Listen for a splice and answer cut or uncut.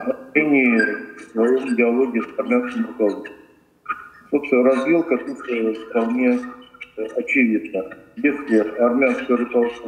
uncut